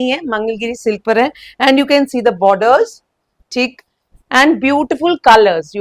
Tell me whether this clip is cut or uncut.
uncut